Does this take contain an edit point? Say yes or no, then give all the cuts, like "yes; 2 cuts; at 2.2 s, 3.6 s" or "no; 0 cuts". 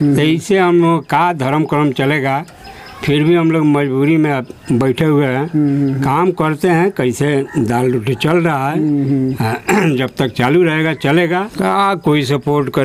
yes; 1 cut; at 11.5 s